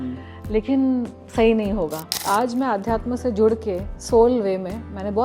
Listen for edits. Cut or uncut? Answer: cut